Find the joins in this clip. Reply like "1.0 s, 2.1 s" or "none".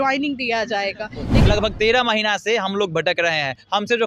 1.3 s